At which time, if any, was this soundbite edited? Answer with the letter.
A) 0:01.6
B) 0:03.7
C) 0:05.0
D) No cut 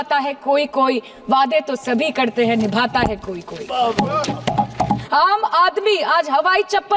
C